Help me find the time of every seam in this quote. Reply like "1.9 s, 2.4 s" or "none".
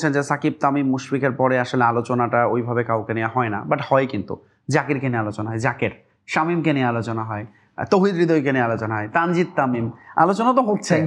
none